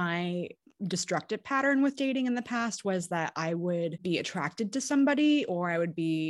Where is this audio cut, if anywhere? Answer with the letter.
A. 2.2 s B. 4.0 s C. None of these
B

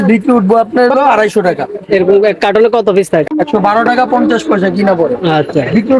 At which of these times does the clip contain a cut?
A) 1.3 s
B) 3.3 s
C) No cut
B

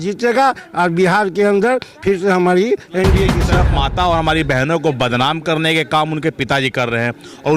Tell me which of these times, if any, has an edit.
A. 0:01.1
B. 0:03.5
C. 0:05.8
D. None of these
B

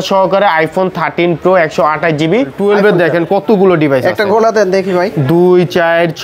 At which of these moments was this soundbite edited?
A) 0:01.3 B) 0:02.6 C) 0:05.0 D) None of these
B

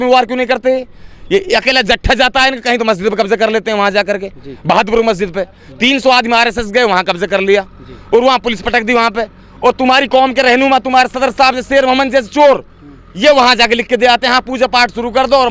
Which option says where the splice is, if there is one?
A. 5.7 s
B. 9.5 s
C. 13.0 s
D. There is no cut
D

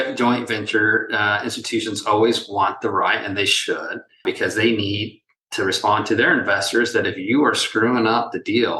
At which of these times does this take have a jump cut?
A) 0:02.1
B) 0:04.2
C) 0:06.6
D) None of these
B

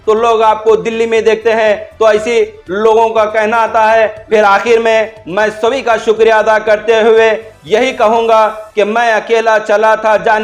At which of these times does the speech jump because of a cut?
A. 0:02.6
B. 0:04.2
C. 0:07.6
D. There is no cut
B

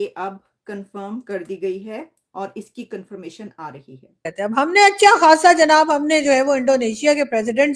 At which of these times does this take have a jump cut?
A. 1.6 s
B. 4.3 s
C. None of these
B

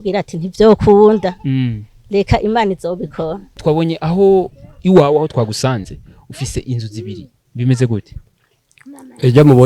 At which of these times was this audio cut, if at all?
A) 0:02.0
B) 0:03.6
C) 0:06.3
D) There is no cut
B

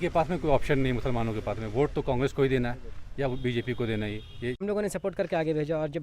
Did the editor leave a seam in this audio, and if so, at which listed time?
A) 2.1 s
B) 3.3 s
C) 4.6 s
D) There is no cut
C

